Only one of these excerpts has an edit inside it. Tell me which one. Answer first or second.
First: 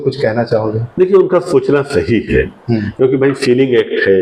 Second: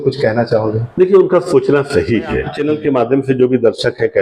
second